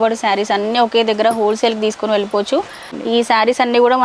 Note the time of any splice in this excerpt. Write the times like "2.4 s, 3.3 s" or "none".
2.9 s